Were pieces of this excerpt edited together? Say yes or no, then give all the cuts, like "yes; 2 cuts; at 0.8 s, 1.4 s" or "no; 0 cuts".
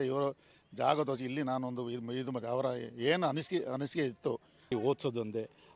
yes; 1 cut; at 4.7 s